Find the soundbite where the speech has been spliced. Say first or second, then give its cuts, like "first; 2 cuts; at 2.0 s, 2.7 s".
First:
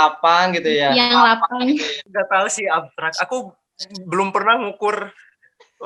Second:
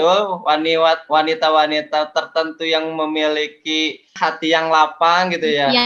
first; 1 cut; at 2.0 s